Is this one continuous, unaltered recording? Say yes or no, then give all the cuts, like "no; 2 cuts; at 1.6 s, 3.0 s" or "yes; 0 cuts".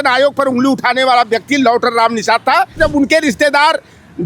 no; 1 cut; at 2.8 s